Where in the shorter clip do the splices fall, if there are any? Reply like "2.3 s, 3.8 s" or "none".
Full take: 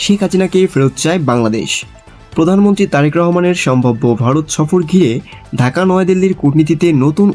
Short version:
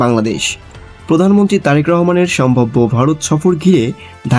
none